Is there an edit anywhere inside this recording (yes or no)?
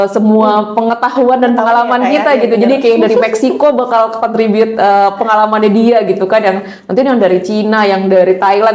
no